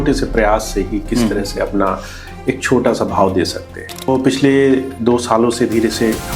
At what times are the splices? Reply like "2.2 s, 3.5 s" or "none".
4.1 s